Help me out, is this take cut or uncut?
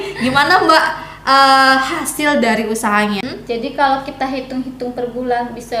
cut